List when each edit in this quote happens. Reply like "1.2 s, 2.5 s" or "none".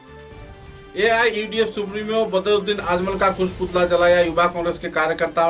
0.9 s